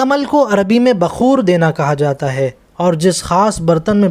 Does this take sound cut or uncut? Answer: uncut